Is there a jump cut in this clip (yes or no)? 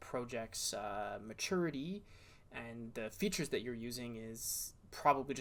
no